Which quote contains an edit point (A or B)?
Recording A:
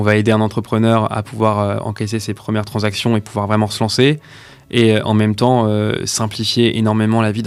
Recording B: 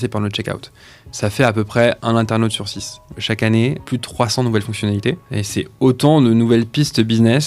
B